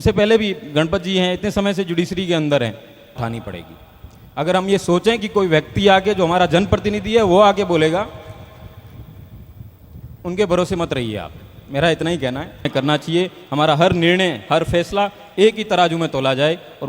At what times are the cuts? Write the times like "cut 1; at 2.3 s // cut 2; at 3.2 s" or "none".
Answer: cut 1; at 3.2 s // cut 2; at 12.7 s